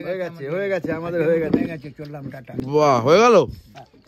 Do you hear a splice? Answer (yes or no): no